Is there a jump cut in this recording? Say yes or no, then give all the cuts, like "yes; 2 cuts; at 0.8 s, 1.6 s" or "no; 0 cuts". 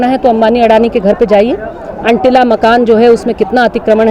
no; 0 cuts